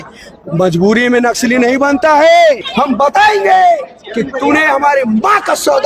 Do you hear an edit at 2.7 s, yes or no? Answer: yes